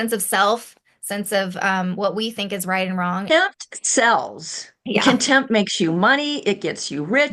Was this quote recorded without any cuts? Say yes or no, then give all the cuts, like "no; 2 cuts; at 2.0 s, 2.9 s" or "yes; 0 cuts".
no; 1 cut; at 3.2 s